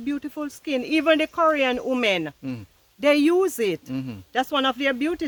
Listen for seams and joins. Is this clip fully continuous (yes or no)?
yes